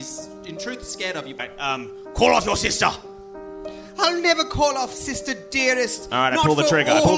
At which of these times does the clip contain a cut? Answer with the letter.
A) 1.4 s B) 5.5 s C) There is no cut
A